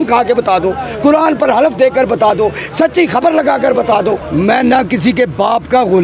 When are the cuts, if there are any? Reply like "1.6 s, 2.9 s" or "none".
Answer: 4.2 s